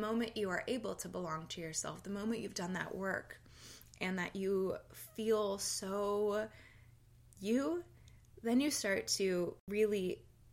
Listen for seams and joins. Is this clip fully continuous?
no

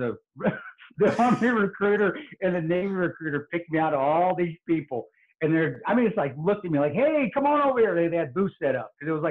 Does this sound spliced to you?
no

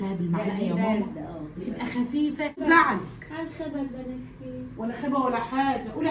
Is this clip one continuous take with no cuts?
no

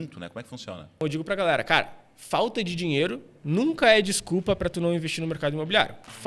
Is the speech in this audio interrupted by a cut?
yes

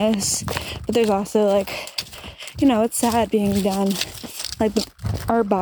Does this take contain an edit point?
no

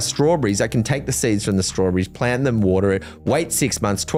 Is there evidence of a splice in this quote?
no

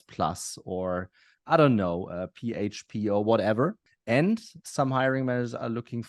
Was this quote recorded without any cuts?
no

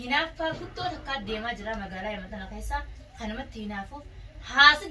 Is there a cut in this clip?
no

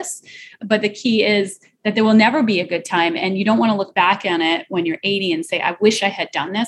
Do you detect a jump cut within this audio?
no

